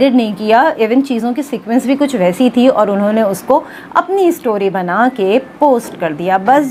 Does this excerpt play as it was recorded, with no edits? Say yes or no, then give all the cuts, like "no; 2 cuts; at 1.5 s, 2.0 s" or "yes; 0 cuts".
yes; 0 cuts